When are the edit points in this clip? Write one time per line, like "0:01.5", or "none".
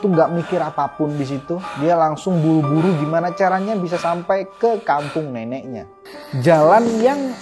0:05.7